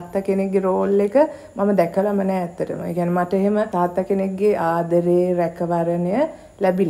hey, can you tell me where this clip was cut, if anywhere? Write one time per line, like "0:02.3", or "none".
0:03.7